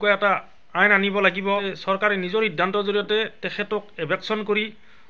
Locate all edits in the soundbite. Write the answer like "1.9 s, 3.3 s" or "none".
1.7 s